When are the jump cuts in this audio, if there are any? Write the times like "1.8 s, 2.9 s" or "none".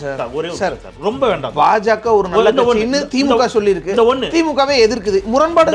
none